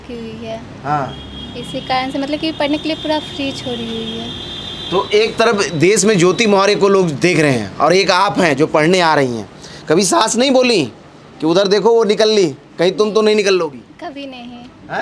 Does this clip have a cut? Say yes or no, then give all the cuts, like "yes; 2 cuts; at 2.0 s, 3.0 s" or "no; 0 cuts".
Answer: no; 0 cuts